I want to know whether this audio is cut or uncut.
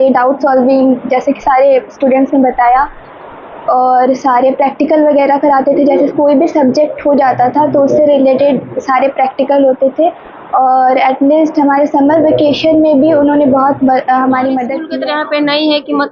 cut